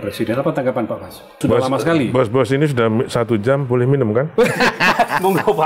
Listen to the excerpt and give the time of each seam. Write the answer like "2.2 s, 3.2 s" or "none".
1.4 s